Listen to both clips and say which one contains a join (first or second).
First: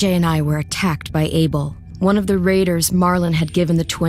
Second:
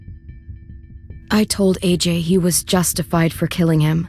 second